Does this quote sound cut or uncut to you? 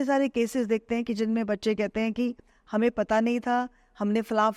uncut